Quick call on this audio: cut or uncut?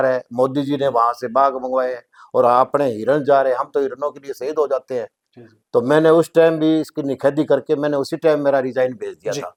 uncut